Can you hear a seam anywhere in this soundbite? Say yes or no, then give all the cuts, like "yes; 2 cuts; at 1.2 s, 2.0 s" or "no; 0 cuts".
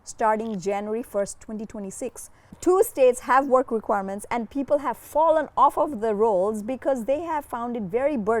yes; 1 cut; at 2.5 s